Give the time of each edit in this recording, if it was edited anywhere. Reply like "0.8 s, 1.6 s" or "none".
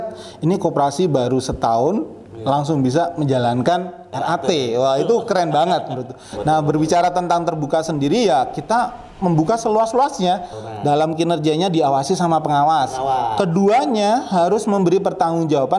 6.2 s, 10.5 s